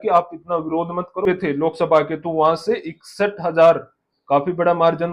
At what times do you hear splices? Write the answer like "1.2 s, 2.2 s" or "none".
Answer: 1.3 s

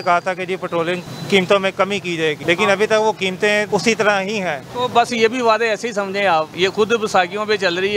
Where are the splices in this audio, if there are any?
2.4 s, 3.7 s, 4.6 s, 6.5 s

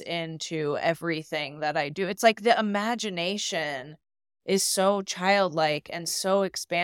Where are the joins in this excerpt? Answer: none

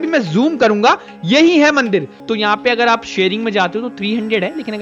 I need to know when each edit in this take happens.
2.2 s

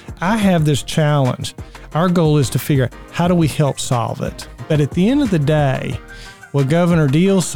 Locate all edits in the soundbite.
4.6 s

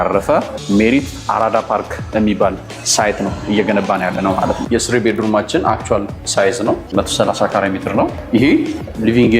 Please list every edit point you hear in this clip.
4.7 s

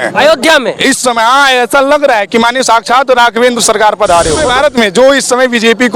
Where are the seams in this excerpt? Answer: 4.5 s

